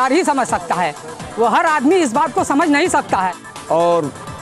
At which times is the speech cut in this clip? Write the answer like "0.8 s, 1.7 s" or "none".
3.5 s